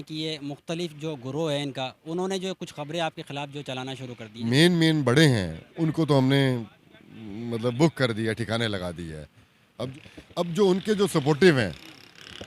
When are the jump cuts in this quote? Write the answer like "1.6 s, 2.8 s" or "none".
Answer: 4.4 s, 9.9 s